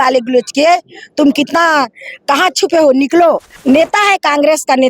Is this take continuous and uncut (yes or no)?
no